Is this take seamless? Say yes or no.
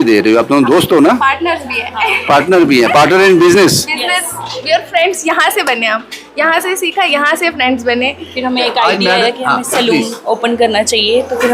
yes